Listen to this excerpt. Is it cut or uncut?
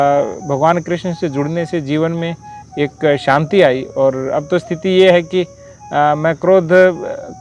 uncut